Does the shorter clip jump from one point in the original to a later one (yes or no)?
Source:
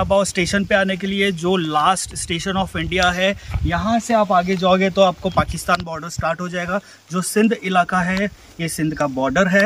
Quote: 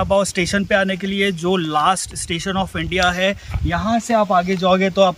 no